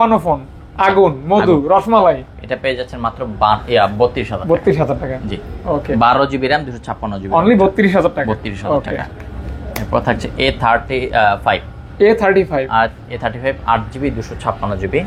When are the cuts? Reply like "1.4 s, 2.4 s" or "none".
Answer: none